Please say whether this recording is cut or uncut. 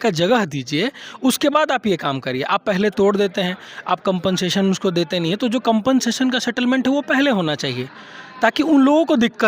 uncut